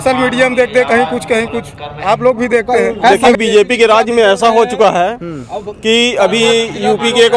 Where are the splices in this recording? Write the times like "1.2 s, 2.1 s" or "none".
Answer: 3.2 s